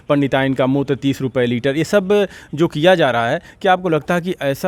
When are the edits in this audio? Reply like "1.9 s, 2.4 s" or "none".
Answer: none